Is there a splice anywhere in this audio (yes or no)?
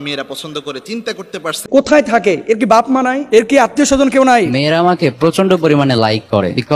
yes